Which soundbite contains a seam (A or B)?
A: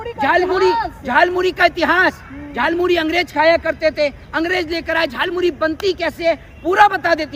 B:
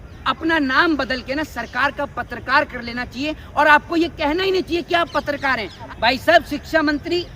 B